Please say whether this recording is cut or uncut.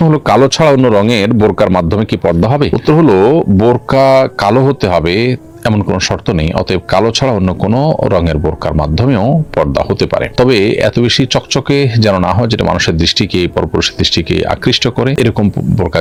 uncut